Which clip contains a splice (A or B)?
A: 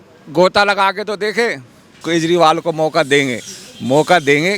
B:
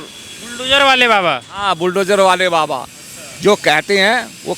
A